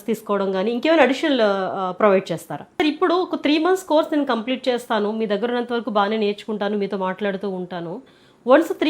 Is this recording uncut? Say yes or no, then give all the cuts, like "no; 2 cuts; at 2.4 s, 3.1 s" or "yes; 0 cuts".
no; 1 cut; at 2.8 s